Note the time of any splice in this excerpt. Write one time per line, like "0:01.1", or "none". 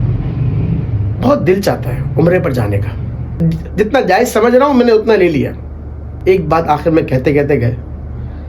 0:03.4
0:06.1